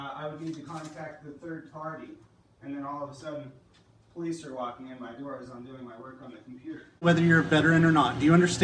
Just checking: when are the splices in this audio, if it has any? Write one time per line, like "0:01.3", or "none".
0:07.1